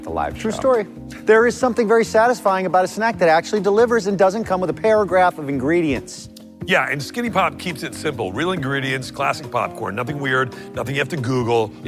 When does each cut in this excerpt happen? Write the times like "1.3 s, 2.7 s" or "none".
none